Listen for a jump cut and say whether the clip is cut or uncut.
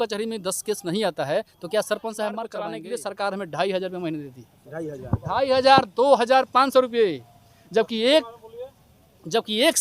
cut